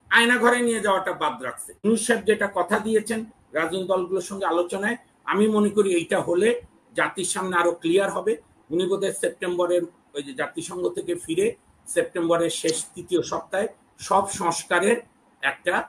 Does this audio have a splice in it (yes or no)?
yes